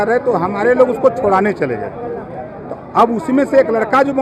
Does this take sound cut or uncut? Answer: uncut